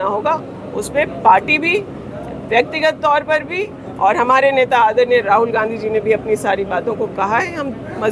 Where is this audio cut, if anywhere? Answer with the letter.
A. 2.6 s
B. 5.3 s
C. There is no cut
C